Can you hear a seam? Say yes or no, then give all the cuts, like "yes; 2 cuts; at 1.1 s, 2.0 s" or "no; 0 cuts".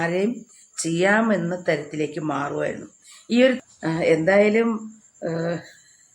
yes; 1 cut; at 3.6 s